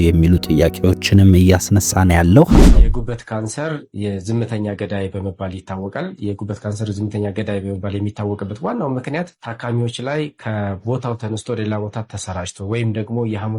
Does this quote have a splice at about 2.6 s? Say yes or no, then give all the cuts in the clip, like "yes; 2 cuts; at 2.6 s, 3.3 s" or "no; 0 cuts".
yes; 1 cut; at 2.6 s